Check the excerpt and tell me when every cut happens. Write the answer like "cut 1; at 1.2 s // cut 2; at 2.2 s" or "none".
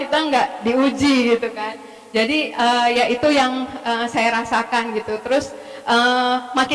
none